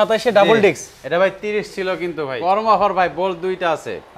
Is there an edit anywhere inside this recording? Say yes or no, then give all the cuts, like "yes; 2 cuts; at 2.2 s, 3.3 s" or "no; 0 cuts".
yes; 1 cut; at 2.3 s